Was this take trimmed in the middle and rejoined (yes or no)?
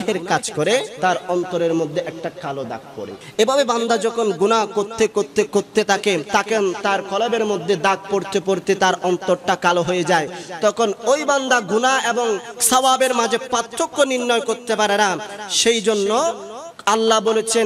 yes